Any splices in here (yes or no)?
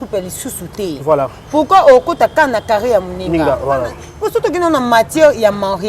yes